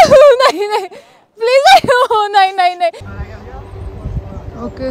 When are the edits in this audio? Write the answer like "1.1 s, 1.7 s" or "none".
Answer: 3.1 s